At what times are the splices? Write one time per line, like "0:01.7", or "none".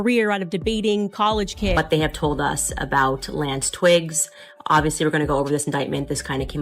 0:01.8